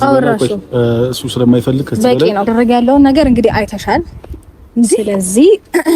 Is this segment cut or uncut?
cut